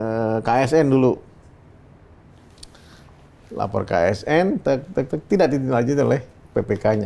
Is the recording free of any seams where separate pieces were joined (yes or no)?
yes